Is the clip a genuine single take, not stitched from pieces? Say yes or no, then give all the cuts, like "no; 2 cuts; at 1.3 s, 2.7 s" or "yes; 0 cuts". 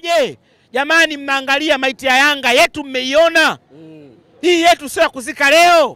yes; 0 cuts